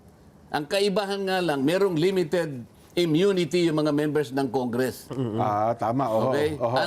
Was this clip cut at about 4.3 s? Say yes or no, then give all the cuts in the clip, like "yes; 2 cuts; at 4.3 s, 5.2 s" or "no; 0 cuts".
no; 0 cuts